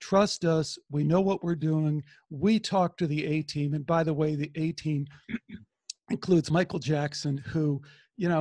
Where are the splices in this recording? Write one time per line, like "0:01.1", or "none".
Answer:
0:06.5